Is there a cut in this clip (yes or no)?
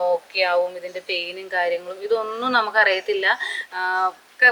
no